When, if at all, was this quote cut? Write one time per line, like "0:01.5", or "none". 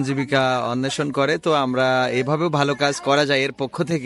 none